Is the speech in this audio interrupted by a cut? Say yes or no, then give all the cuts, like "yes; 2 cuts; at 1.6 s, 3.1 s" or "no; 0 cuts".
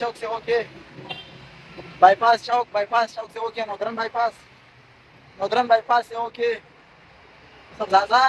no; 0 cuts